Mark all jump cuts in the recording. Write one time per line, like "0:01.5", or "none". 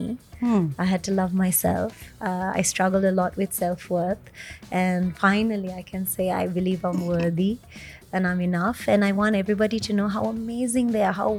none